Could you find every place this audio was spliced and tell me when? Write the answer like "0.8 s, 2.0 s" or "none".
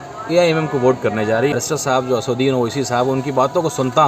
1.5 s